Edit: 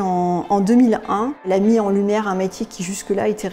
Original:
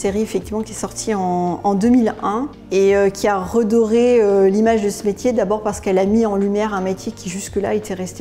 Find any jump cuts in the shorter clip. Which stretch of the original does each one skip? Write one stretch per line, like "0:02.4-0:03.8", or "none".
0:02.5-0:05.9